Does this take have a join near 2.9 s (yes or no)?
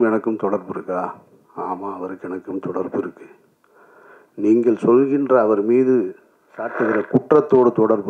no